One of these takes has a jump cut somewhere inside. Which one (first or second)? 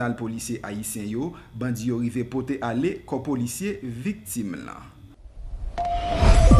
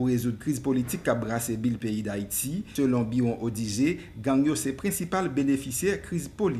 first